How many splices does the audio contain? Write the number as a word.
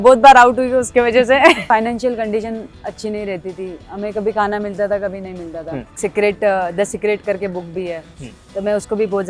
two